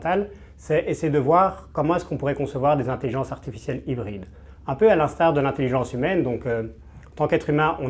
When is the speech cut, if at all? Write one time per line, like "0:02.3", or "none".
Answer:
none